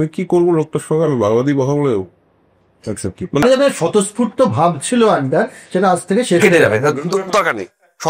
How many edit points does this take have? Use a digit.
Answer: 1